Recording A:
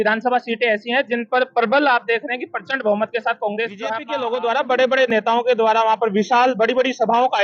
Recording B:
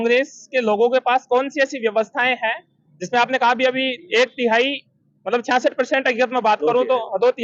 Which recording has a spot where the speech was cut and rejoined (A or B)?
A